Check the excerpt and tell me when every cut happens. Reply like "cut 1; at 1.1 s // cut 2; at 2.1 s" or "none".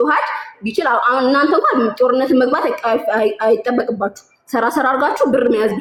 none